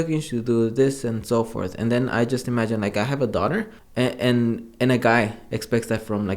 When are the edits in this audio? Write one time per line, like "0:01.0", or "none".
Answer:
0:03.8